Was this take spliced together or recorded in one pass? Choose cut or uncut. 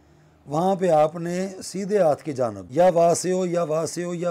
cut